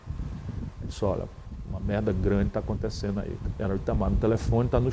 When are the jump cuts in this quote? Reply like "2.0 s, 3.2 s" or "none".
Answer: 3.4 s